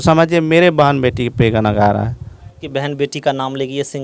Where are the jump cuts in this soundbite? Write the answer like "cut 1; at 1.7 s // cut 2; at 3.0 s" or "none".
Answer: cut 1; at 2.6 s